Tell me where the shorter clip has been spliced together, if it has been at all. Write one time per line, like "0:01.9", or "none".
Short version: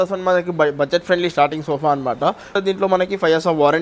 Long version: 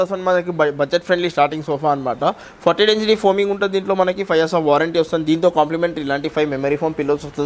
0:02.5